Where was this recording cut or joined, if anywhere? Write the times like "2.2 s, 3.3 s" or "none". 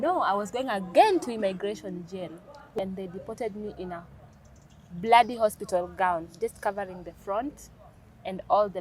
2.7 s

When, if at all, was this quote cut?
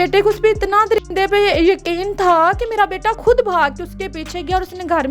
3.2 s

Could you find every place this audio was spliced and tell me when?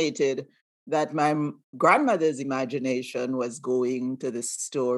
none

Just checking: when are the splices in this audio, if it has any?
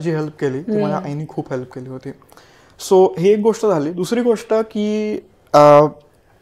none

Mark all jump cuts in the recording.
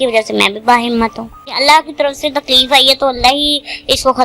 1.6 s

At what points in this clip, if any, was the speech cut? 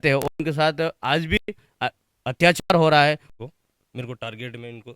3.3 s

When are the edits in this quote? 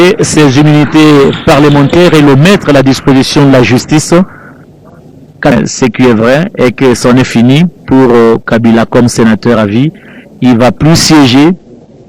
5.5 s

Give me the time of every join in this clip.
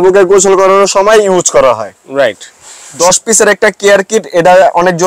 3.0 s

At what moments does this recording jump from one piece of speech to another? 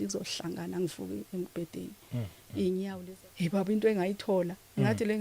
3.0 s

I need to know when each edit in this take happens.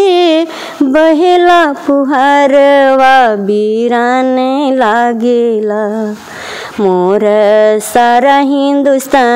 none

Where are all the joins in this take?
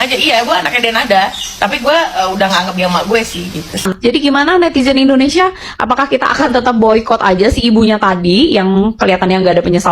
3.9 s

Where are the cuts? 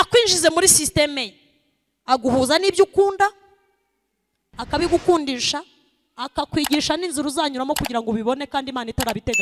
none

